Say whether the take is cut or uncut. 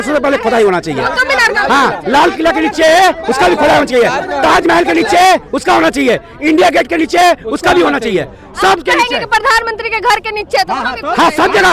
uncut